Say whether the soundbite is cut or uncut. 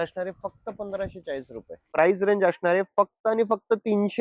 cut